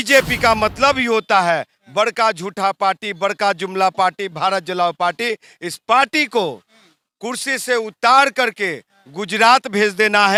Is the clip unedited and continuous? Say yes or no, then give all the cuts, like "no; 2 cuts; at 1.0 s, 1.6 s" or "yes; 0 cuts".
yes; 0 cuts